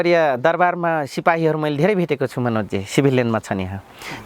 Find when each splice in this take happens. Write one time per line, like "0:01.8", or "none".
none